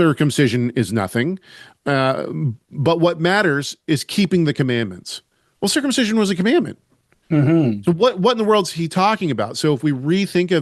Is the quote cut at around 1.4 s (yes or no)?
no